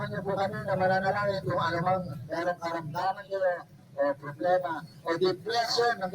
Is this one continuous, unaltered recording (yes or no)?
no